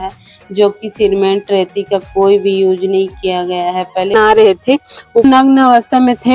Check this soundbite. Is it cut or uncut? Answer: cut